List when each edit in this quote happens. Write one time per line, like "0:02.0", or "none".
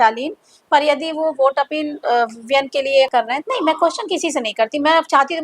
0:03.1